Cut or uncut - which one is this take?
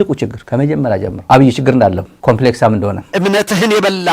cut